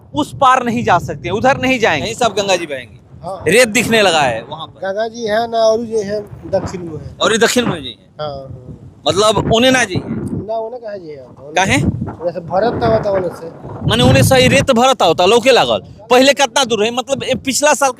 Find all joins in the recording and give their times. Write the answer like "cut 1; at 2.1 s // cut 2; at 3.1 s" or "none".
cut 1; at 2.1 s